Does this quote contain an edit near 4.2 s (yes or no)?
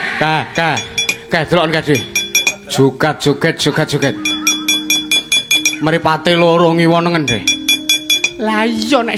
no